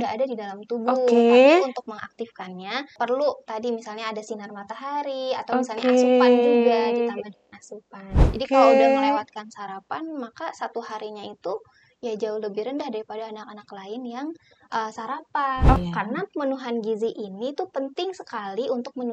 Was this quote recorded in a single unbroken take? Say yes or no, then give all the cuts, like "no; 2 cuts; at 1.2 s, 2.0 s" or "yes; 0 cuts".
no; 3 cuts; at 2.9 s, 8.3 s, 15.8 s